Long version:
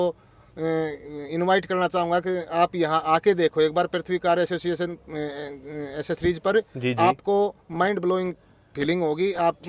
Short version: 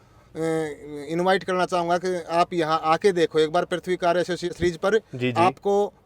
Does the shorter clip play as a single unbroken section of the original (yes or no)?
no